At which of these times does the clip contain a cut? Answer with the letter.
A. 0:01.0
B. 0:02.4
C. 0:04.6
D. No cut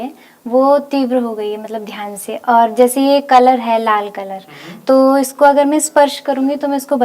D